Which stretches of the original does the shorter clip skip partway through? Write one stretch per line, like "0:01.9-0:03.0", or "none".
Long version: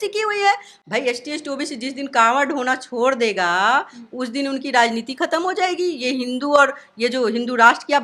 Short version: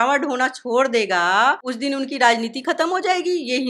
0:03.9-0:04.2